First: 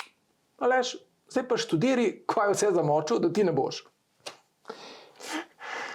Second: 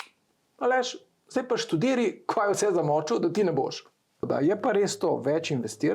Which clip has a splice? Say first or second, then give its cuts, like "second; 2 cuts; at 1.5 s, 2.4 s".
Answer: second; 1 cut; at 4.2 s